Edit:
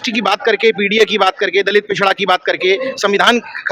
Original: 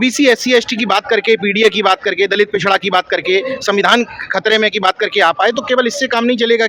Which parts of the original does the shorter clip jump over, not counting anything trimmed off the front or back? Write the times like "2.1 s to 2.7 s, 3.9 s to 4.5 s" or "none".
none